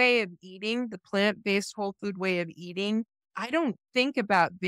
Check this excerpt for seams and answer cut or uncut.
uncut